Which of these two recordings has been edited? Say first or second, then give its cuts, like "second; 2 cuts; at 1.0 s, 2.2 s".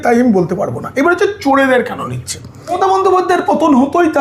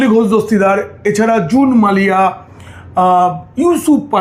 first; 1 cut; at 2.7 s